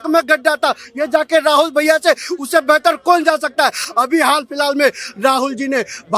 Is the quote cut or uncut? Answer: uncut